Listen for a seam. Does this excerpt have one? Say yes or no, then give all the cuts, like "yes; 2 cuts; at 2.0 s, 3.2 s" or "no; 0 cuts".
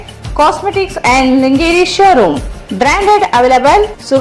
no; 0 cuts